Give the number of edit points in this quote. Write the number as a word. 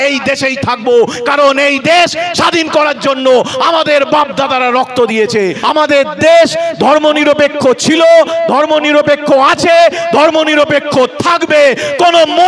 one